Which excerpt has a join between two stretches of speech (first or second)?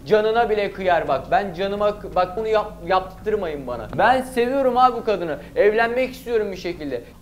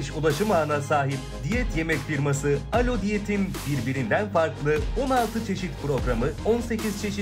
first